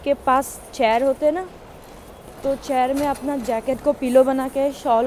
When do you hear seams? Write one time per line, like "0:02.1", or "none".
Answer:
none